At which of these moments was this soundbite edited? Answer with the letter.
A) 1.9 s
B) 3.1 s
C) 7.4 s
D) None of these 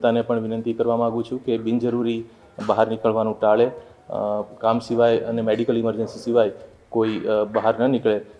D